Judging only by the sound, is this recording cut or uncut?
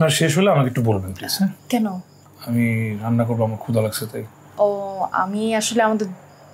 cut